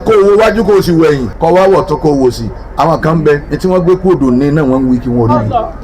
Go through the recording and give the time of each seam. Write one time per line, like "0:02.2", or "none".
0:01.3
0:03.5